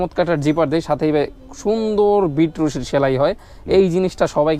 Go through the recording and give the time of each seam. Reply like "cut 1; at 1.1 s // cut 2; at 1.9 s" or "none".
none